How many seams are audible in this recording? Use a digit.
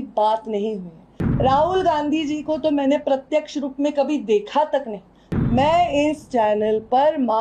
1